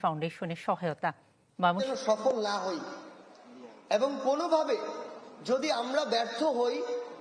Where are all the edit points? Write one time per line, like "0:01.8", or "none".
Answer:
0:01.8